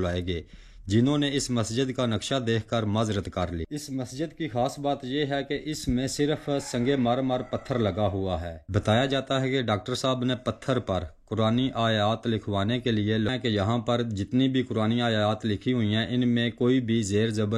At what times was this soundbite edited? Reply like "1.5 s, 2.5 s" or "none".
3.7 s, 8.6 s, 13.3 s

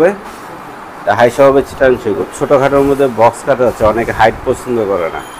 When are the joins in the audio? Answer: 2.3 s

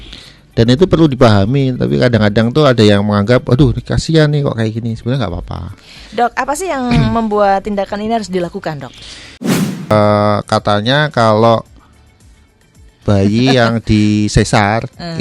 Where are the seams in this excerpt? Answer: 9.5 s

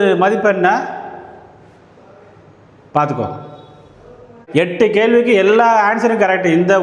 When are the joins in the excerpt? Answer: 4.4 s

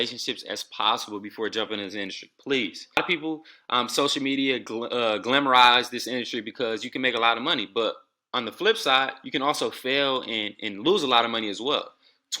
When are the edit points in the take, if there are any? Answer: 3.0 s

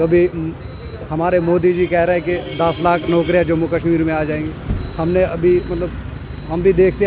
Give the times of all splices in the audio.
none

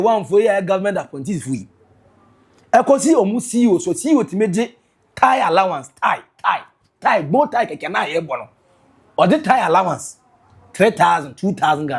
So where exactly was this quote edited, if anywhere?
none

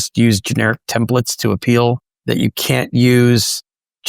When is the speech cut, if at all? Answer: 2.1 s

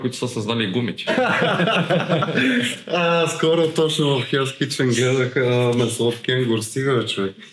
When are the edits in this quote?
1.1 s

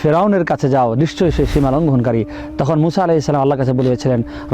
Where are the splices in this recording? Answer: none

